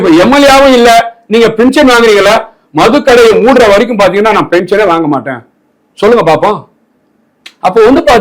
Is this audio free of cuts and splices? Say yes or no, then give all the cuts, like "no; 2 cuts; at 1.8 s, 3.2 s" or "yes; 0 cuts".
yes; 0 cuts